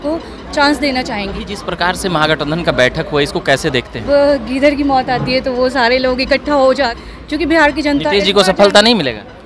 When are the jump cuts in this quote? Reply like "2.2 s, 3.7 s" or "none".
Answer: 1.4 s, 4.0 s, 6.9 s